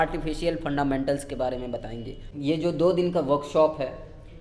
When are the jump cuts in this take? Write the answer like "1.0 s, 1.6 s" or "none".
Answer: 2.2 s

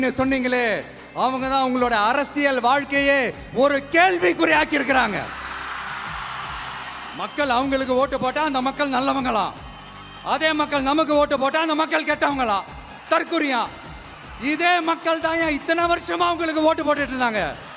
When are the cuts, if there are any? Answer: 7.1 s

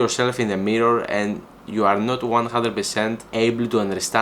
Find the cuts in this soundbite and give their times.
3.2 s

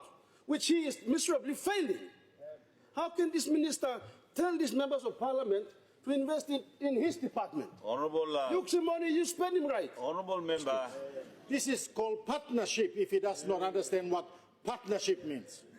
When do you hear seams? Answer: 11.0 s

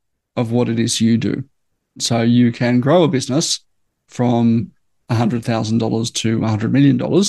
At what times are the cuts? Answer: 2.0 s

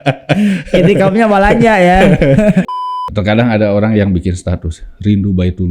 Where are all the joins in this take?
2.7 s

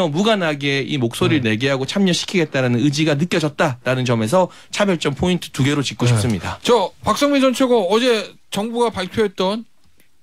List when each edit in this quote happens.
none

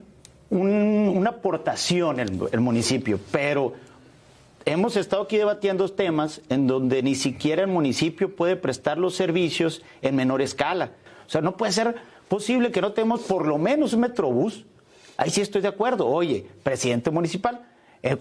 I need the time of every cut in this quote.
11.1 s

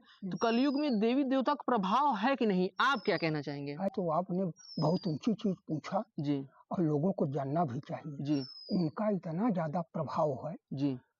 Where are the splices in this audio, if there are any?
3.9 s

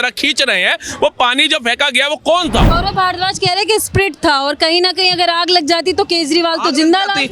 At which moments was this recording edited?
2.7 s

